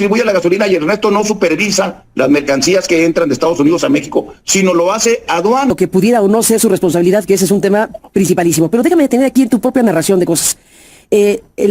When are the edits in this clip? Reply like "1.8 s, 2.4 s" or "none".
5.7 s